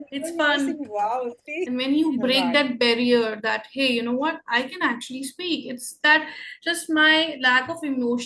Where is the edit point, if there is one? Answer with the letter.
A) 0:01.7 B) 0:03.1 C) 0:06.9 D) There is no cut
A